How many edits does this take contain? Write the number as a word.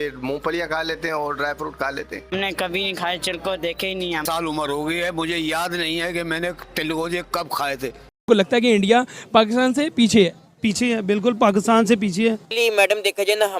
three